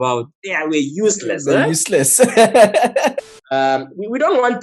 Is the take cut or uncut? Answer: cut